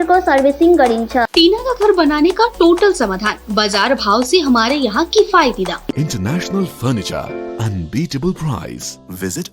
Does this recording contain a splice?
yes; 2 cuts; at 1.3 s, 5.9 s

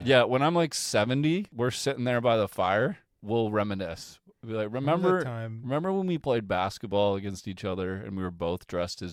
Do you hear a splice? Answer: no; 0 cuts

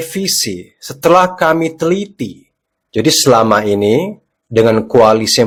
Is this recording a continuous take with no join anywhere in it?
yes; 0 cuts

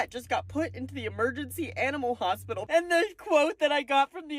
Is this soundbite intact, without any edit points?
no; 1 cut; at 2.6 s

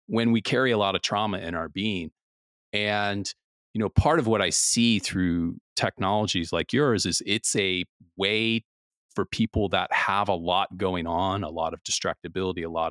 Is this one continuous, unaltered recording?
yes; 0 cuts

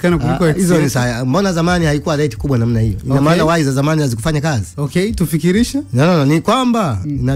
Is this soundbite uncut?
yes; 0 cuts

